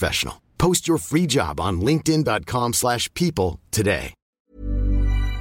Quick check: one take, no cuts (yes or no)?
no